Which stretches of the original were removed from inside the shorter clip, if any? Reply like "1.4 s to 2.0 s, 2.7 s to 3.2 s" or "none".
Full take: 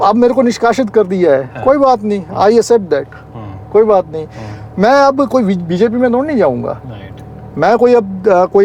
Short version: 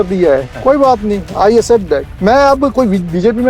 3.1 s to 4.7 s

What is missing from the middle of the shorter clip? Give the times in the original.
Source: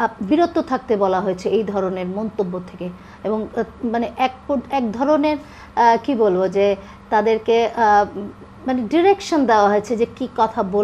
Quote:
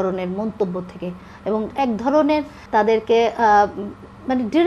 3.5 s to 4.7 s, 5.5 s to 6.9 s

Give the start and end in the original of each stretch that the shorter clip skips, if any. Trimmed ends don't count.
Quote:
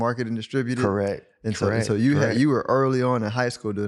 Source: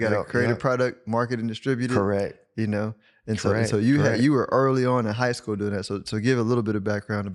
2.4 s to 3.1 s

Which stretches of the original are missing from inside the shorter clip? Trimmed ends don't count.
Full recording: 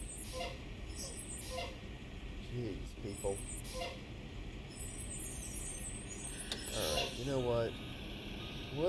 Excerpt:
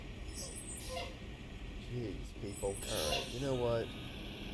3.4 s to 6.7 s

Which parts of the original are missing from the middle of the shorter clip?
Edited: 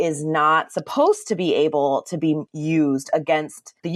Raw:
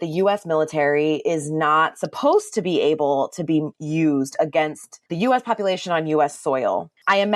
none

